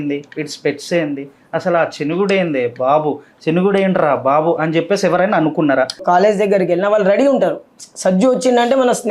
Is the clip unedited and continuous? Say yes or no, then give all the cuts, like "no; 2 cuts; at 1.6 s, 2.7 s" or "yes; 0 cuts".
no; 1 cut; at 6.0 s